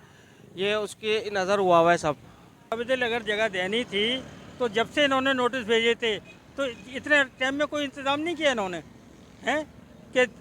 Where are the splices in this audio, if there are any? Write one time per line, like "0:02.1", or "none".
0:02.7